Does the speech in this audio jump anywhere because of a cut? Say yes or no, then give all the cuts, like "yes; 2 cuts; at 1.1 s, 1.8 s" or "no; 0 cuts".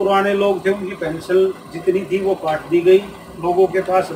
no; 0 cuts